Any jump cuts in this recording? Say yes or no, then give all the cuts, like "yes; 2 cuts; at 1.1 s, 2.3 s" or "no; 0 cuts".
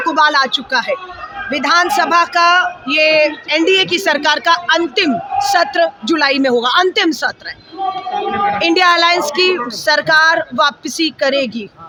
no; 0 cuts